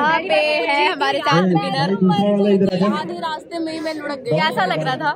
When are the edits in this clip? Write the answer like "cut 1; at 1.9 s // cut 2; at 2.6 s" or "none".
none